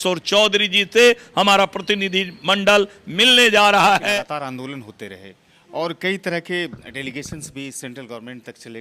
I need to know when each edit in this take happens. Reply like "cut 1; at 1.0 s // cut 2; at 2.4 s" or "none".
cut 1; at 4.1 s